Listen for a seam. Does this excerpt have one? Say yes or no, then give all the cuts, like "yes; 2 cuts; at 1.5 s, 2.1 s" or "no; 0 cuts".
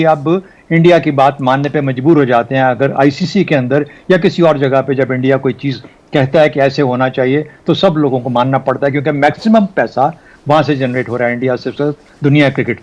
no; 0 cuts